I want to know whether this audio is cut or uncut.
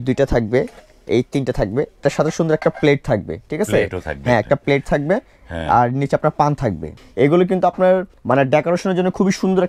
cut